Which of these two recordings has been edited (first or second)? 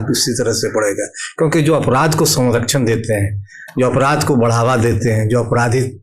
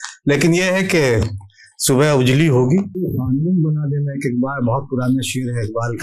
second